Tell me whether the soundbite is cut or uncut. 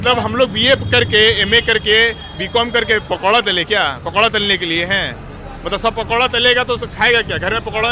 uncut